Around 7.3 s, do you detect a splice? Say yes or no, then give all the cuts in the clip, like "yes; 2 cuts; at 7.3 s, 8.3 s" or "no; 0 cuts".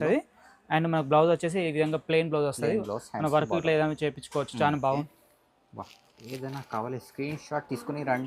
no; 1 cut; at 5.0 s